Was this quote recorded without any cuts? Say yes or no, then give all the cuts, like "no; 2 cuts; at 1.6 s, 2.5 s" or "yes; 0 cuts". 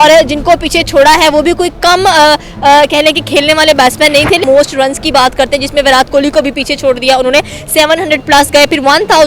no; 1 cut; at 4.4 s